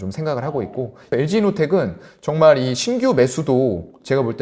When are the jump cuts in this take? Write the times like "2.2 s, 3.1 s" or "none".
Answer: 1.1 s